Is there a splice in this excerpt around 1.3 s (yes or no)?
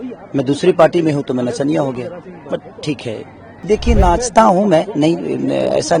no